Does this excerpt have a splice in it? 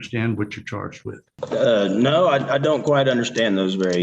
yes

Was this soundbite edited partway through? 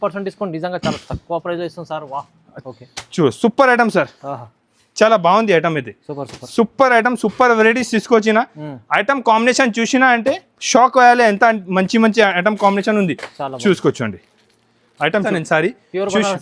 yes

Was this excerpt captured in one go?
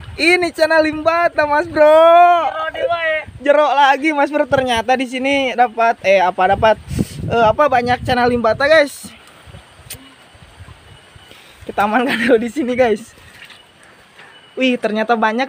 yes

